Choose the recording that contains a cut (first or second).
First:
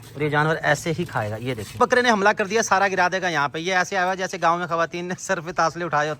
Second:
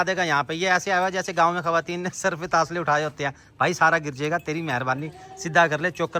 first